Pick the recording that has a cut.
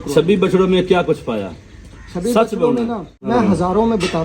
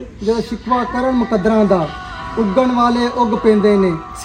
first; 1 cut; at 3.1 s

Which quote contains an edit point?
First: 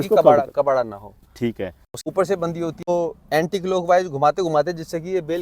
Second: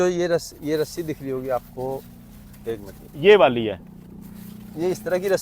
first; 2 cuts; at 1.9 s, 2.9 s

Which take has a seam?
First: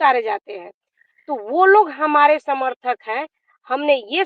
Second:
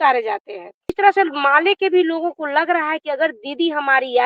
second; 1 cut; at 1.0 s

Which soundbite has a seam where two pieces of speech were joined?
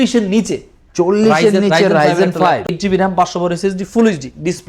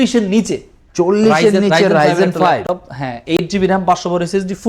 first; 1 cut; at 2.7 s

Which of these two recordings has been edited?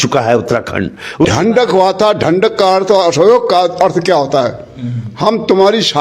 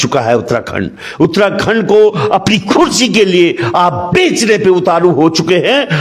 first; 1 cut; at 1.3 s

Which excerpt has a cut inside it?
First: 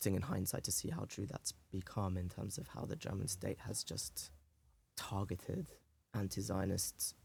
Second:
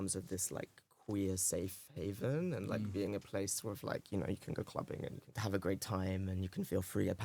second; 1 cut; at 5.3 s

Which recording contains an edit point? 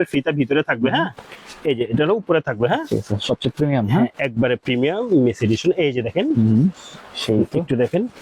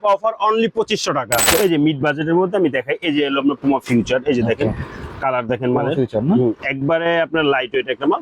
second; 1 cut; at 1.4 s

